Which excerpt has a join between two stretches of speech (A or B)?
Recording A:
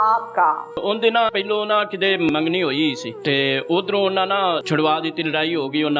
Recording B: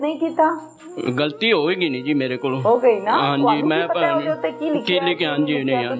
A